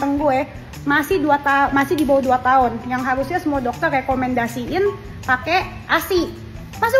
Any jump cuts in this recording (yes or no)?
no